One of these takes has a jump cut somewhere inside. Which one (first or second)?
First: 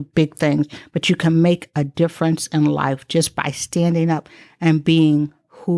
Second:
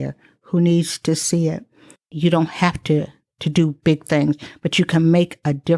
second